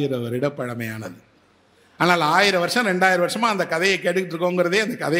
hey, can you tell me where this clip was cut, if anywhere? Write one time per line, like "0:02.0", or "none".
none

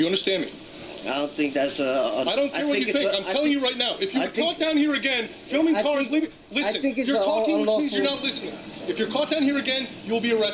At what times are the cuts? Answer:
0:04.0

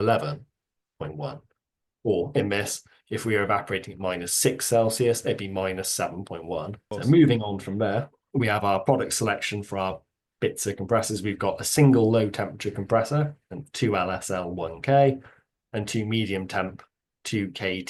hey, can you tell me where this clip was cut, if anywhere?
0:06.9

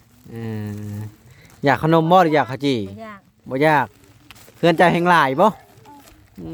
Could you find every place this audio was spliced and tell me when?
none

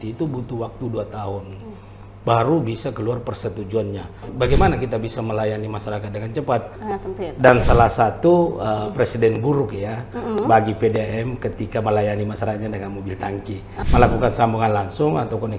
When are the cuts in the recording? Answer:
0:04.2
0:06.7
0:13.7

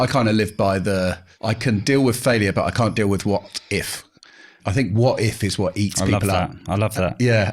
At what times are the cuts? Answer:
0:01.3
0:04.6

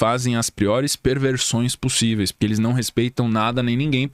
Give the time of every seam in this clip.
none

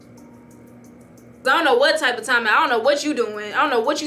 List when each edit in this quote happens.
0:01.4

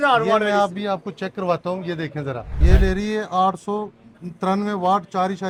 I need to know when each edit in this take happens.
none

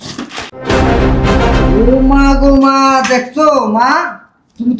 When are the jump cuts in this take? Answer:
none

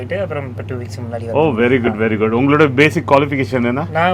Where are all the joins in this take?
none

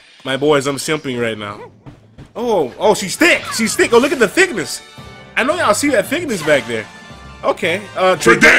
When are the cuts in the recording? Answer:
none

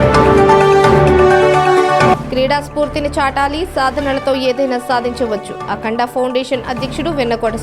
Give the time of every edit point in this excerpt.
0:01.5

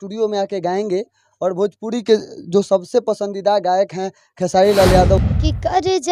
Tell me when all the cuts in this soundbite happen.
0:05.2

